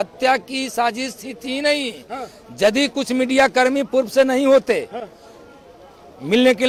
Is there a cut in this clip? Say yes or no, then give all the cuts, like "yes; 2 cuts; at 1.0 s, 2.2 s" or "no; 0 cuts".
no; 0 cuts